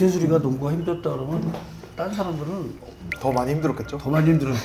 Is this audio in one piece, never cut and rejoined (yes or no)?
yes